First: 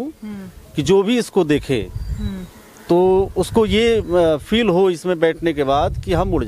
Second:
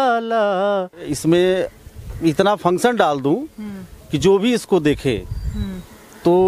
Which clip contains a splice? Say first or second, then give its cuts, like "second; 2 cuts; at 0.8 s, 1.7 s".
second; 1 cut; at 1.1 s